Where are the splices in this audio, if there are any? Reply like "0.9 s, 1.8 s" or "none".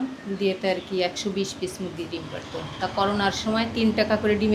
none